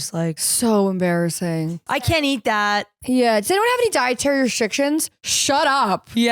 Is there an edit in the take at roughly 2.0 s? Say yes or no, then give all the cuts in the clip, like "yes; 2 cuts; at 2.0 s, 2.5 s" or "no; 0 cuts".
yes; 1 cut; at 2.0 s